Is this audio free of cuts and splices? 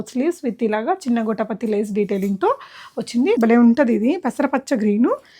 no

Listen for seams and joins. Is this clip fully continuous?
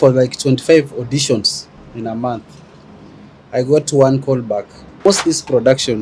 no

